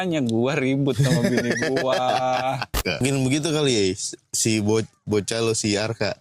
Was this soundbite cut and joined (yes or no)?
yes